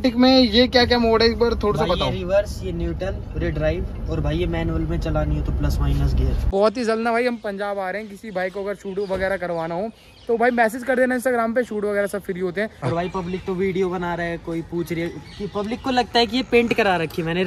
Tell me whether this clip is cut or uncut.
cut